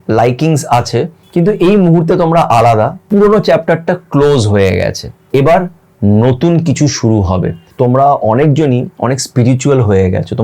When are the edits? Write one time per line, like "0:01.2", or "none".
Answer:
0:01.2
0:03.0
0:05.1
0:07.6